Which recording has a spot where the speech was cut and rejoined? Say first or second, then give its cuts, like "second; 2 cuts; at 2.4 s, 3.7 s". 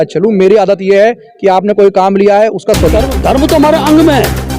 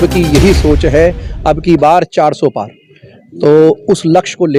first; 1 cut; at 2.9 s